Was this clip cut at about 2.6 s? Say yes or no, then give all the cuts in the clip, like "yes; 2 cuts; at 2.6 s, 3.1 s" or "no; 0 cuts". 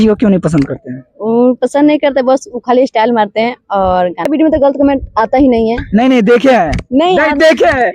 no; 1 cut; at 4.3 s